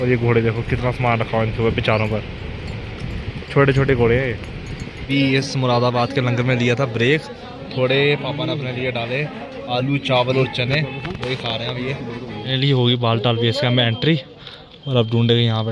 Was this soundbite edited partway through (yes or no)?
yes